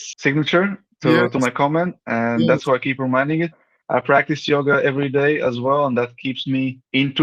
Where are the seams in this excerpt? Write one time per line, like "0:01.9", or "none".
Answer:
none